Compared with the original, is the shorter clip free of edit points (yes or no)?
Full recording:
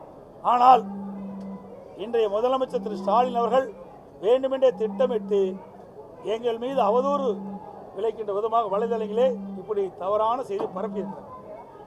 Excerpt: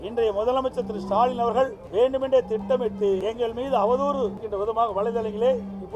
no